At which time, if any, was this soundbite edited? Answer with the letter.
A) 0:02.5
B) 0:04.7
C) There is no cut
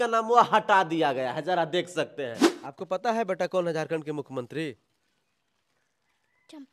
A